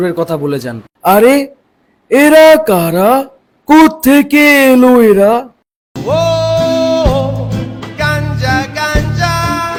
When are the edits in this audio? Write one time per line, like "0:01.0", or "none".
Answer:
none

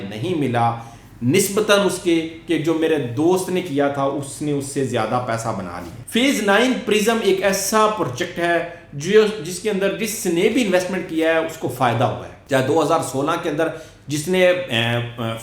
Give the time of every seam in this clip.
0:06.0

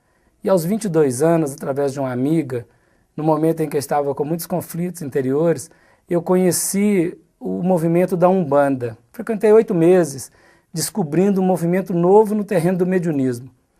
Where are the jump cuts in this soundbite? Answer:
0:11.7

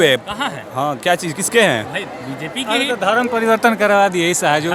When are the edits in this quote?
none

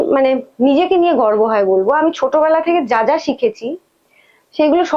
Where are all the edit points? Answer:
none

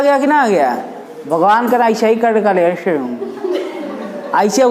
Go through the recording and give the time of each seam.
none

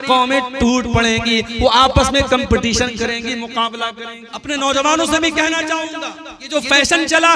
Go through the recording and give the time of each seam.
0:04.3
0:06.5

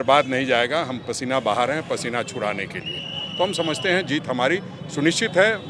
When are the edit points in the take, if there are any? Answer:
none

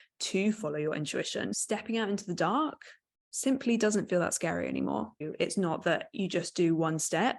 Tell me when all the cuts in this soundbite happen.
0:01.6
0:05.2

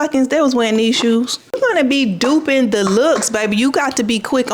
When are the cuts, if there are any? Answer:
0:01.6

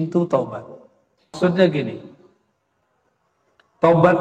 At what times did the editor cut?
0:01.3

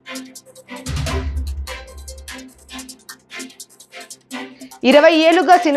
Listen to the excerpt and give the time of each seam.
0:04.6

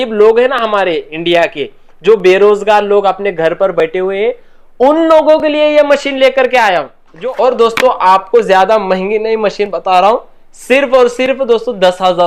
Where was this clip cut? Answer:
0:07.0

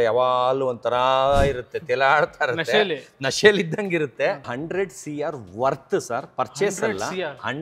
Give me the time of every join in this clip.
0:04.5

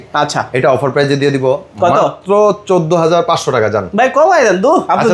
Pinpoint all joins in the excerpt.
none

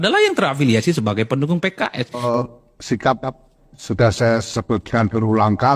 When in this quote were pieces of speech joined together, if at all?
0:02.2

